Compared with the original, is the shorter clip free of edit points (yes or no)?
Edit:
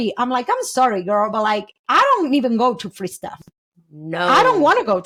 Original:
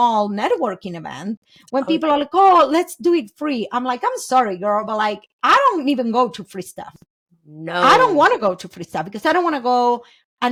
yes